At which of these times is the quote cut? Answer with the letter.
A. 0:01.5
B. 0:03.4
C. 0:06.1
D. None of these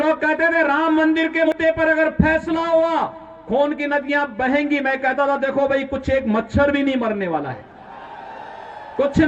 A